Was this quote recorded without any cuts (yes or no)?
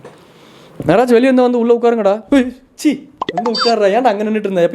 yes